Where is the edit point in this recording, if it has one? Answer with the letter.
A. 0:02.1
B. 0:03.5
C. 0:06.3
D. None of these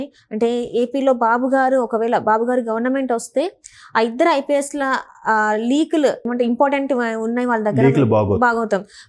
C